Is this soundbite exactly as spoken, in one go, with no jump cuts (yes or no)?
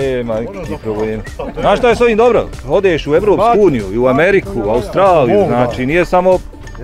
no